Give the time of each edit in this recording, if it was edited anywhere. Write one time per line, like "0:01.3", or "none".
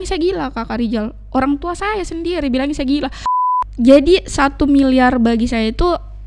0:03.2

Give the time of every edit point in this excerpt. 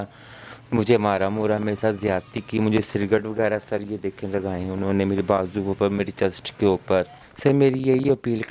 0:07.2

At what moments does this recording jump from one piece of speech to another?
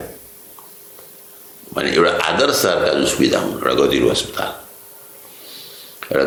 none

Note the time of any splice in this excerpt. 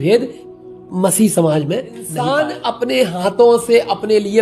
0:02.1

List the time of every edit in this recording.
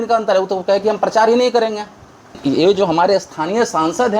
0:02.4

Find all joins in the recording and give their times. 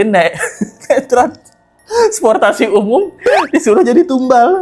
none

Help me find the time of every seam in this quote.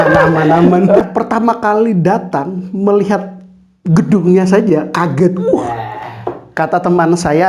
0:01.0

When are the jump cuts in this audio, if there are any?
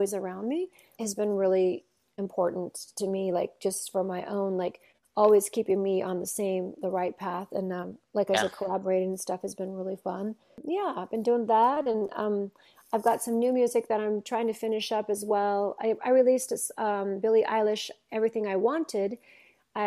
0:01.0
0:02.0
0:10.6

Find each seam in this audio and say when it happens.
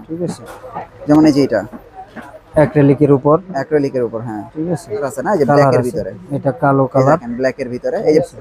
0:05.1

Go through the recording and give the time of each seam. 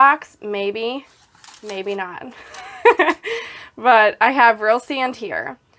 none

